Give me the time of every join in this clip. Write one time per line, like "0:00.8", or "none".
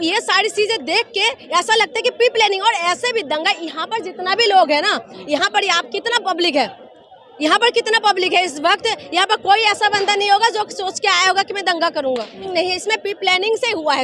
0:12.4